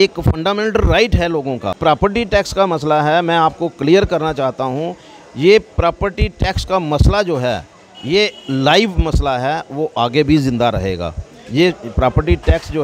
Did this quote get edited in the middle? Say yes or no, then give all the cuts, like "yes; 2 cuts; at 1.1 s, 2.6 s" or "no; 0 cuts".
yes; 1 cut; at 2.0 s